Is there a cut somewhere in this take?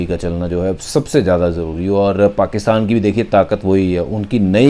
no; 0 cuts

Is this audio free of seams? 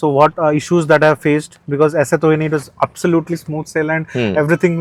yes; 0 cuts

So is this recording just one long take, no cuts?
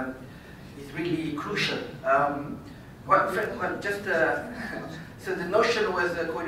yes; 0 cuts

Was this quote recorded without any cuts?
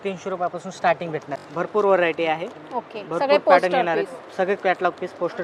yes; 0 cuts

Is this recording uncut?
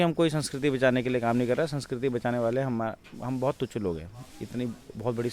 yes; 0 cuts

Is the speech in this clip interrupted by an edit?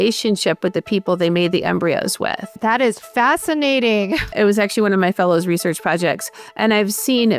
yes; 2 cuts; at 2.6 s, 4.3 s

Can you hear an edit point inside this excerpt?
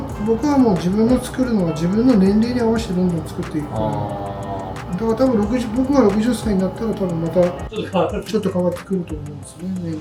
no; 0 cuts

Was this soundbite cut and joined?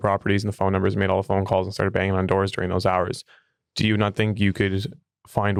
no; 0 cuts

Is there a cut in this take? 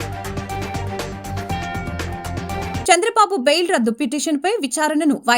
yes; 1 cut; at 2.8 s

